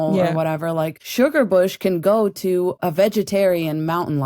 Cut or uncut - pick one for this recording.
cut